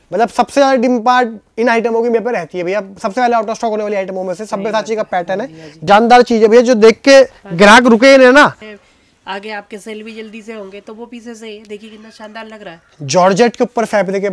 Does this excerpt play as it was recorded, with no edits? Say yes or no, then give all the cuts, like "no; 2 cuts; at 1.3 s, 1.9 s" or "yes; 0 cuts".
no; 2 cuts; at 5.8 s, 8.7 s